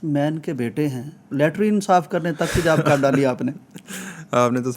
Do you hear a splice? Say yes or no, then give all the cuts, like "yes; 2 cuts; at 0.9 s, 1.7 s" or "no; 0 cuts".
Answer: yes; 1 cut; at 1.3 s